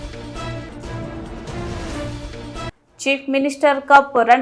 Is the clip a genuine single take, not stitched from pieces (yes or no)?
no